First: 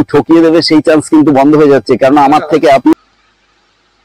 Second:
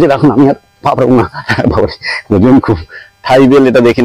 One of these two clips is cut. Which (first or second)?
first